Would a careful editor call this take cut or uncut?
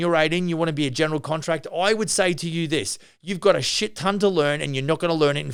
uncut